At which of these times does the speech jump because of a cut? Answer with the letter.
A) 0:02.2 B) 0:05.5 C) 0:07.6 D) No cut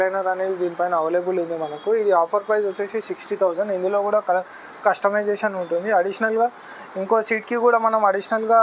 D